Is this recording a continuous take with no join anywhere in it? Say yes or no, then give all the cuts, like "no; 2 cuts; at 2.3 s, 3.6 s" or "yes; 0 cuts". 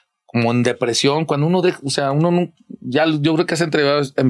yes; 0 cuts